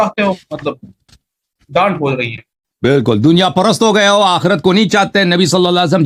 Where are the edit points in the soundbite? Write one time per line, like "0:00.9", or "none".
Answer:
none